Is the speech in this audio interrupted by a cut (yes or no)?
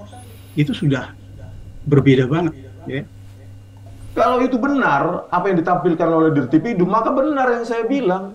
yes